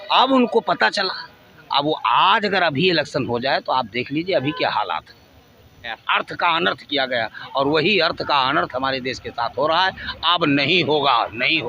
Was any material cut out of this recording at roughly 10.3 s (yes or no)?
no